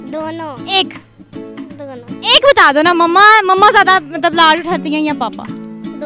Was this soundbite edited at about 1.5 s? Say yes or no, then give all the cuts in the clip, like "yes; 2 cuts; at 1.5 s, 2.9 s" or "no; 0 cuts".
no; 0 cuts